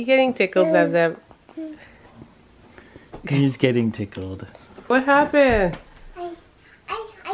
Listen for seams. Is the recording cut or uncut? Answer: cut